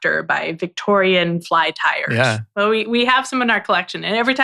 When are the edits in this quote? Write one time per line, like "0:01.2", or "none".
0:02.0